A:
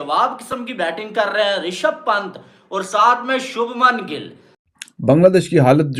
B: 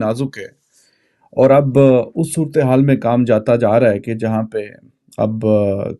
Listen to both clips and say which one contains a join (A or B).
A